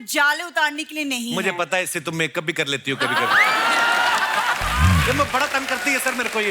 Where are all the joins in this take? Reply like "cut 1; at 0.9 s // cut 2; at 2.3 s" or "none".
none

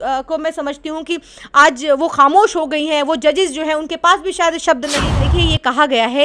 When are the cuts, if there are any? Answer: cut 1; at 5.1 s

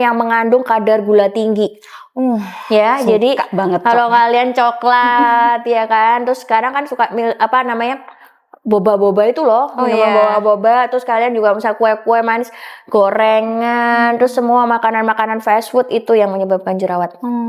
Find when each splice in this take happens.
none

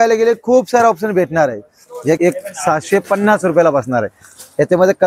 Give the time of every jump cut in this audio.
cut 1; at 2.2 s

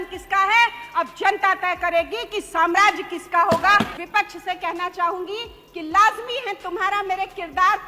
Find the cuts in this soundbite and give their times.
cut 1; at 3.9 s

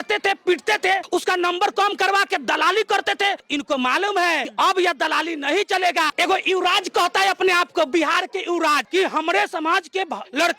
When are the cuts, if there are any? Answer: cut 1; at 3.4 s // cut 2; at 4.5 s // cut 3; at 6.1 s // cut 4; at 8.8 s

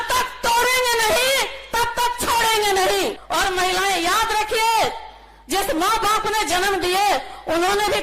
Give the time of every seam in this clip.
cut 1; at 3.2 s

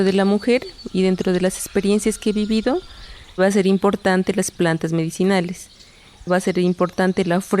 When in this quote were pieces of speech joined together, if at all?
cut 1; at 3.4 s // cut 2; at 6.2 s

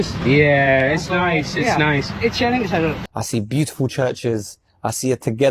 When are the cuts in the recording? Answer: cut 1; at 3.0 s

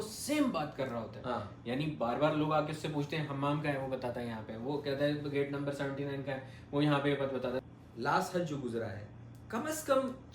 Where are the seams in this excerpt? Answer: cut 1; at 7.6 s

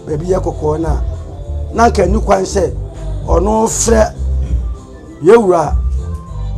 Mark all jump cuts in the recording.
none

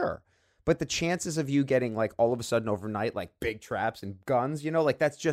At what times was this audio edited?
none

